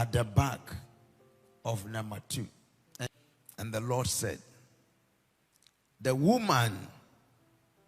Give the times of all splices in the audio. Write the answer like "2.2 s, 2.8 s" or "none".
3.1 s